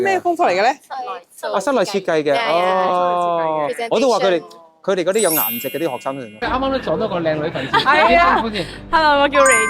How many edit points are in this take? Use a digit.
1